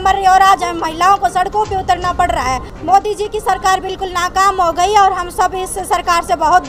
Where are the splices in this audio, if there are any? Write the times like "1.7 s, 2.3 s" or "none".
2.7 s